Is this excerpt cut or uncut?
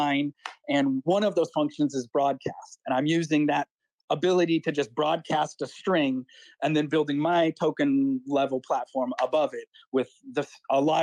uncut